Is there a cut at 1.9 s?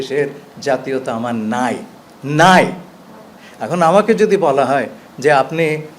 no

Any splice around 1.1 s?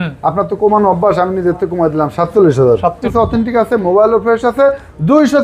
no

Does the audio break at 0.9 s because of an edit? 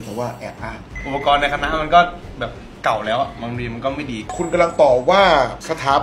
yes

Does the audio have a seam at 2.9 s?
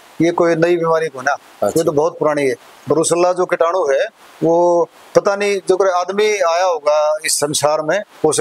no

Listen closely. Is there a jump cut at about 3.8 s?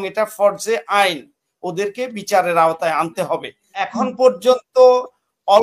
yes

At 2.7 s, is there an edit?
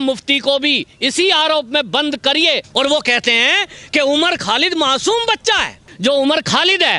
yes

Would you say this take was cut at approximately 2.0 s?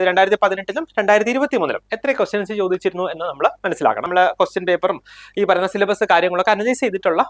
no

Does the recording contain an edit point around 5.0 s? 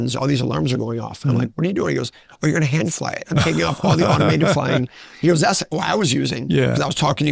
no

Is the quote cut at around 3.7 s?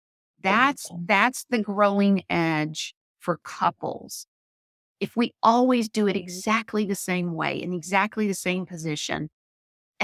no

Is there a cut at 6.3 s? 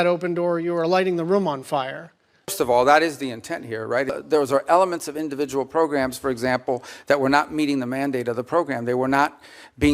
no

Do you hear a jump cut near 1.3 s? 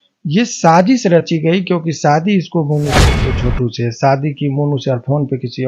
no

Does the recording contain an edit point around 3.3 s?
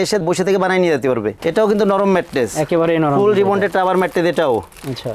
no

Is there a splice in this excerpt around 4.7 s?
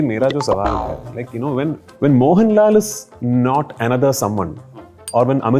no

